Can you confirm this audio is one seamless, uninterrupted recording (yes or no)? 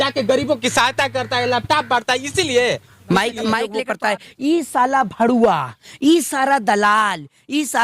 no